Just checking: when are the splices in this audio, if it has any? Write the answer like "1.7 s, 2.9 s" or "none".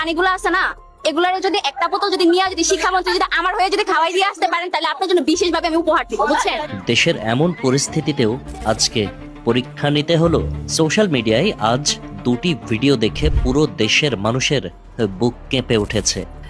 6.6 s